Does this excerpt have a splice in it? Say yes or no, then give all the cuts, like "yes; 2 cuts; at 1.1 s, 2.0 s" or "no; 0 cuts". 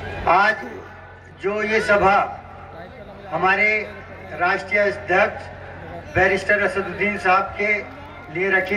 no; 0 cuts